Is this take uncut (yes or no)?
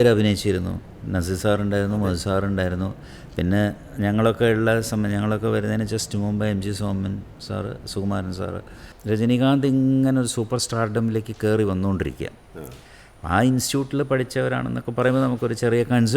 no